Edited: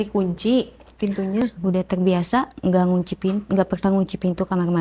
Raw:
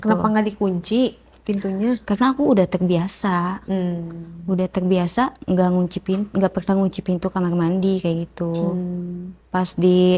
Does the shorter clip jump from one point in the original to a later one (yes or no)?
yes